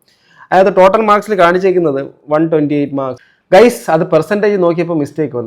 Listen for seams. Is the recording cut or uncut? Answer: cut